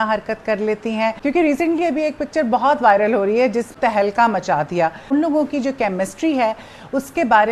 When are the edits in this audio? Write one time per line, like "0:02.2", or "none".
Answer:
0:01.2
0:03.7
0:05.0